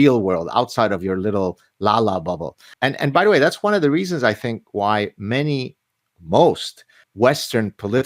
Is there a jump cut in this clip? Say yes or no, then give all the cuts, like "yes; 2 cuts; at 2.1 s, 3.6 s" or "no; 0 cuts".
yes; 2 cuts; at 2.7 s, 7.0 s